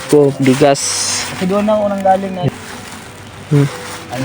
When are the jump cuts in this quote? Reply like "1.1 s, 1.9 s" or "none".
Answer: 2.5 s